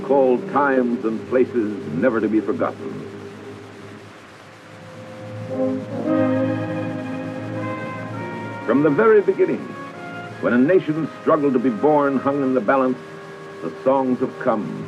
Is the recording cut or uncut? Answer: uncut